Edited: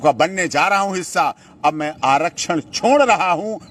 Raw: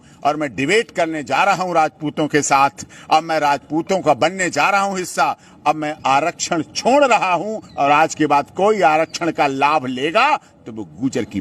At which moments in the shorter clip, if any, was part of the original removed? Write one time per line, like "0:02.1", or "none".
none